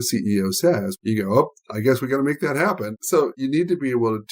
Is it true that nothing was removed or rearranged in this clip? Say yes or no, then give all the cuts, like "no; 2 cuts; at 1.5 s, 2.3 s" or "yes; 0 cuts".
no; 2 cuts; at 0.9 s, 3.3 s